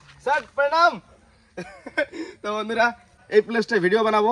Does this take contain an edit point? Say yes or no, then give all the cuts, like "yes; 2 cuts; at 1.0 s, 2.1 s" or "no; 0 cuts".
no; 0 cuts